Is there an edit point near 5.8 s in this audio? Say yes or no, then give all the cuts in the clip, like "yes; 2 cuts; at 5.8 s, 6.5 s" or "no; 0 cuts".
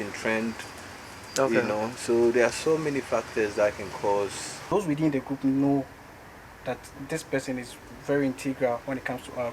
no; 1 cut; at 4.6 s